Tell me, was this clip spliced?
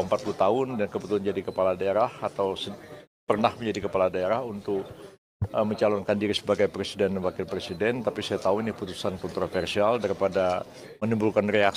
no; 0 cuts

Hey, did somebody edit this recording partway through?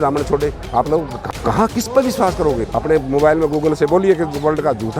yes; 2 cuts; at 1.2 s, 2.6 s

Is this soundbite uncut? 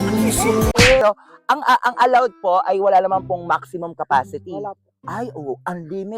no; 1 cut; at 1.0 s

